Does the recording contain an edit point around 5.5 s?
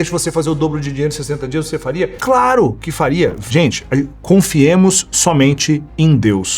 no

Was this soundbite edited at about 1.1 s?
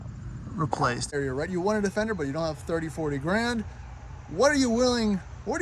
yes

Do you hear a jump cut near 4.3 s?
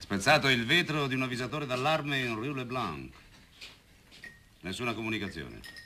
yes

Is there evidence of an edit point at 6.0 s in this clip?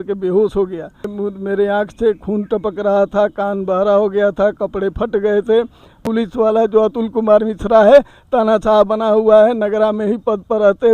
yes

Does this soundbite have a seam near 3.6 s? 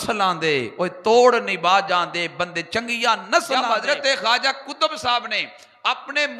yes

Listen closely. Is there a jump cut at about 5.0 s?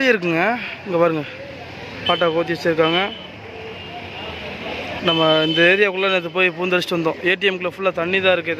yes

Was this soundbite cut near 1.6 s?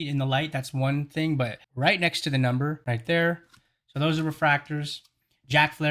yes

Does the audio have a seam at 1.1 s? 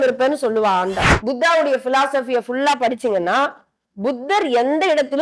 yes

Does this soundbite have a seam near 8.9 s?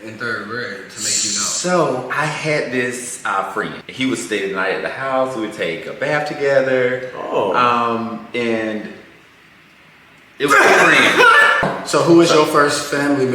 no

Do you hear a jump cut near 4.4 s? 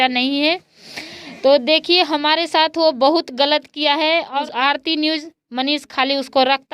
yes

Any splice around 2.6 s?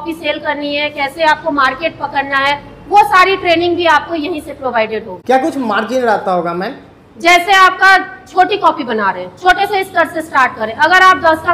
no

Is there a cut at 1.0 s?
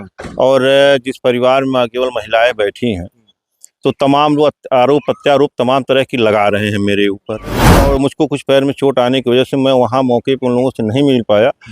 no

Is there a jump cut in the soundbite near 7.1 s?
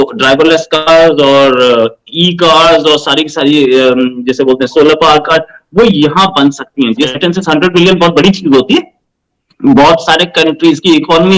yes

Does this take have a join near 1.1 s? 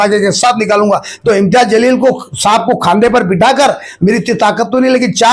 yes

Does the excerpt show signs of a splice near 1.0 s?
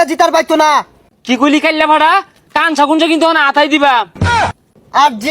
yes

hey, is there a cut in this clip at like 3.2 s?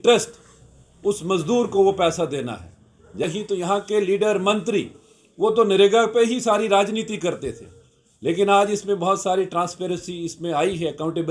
yes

